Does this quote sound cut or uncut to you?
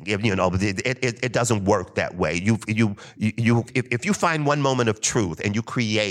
cut